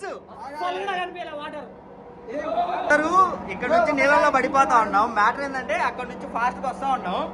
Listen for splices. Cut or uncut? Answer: cut